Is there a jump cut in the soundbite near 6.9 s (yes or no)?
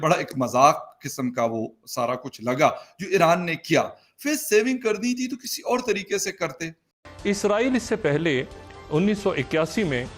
yes